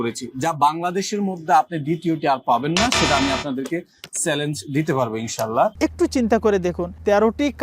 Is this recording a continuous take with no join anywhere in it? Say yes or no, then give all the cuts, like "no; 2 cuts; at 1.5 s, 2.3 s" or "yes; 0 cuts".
no; 1 cut; at 5.7 s